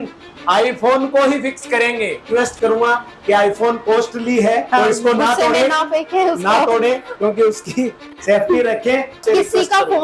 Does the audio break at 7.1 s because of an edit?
no; 3 cuts; at 2.2 s, 4.7 s, 9.2 s

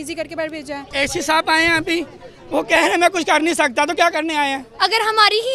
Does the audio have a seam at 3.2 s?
no; 2 cuts; at 0.8 s, 4.7 s

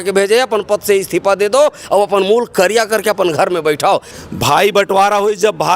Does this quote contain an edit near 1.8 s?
no; 1 cut; at 4.1 s

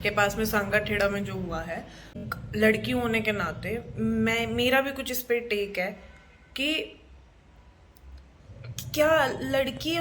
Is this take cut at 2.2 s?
yes; 1 cut; at 2.2 s

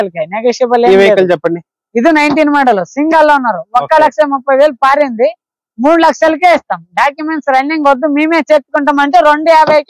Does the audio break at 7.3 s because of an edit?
no; 0 cuts

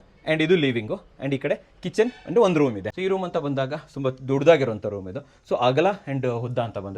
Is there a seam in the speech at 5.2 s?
no; 1 cut; at 2.9 s

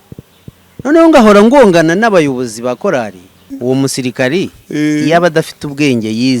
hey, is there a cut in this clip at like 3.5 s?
yes; 1 cut; at 3.5 s

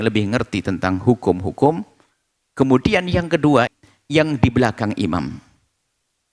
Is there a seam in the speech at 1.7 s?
no; 1 cut; at 3.7 s

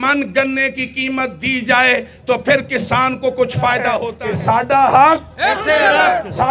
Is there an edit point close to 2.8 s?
no; 1 cut; at 4.2 s

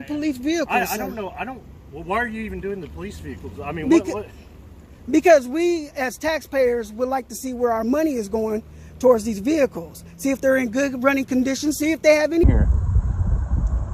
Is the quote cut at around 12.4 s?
yes; 1 cut; at 12.4 s

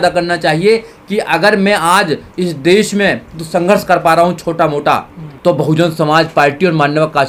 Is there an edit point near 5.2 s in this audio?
no; 0 cuts

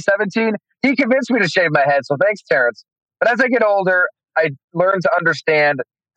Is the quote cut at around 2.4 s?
no; 0 cuts

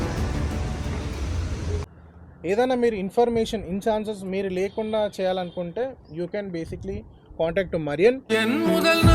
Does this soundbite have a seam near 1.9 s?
yes; 1 cut; at 1.9 s

